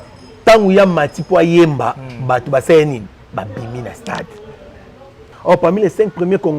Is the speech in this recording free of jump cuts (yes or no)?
no